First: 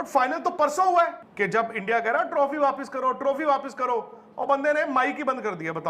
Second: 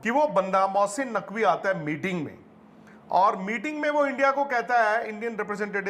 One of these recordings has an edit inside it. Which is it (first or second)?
first